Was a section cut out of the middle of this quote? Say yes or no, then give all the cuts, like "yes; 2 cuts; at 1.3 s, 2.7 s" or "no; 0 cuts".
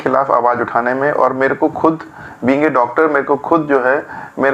no; 0 cuts